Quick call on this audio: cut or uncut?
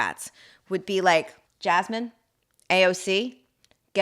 cut